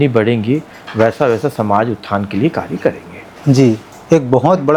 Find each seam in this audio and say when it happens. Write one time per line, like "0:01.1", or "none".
none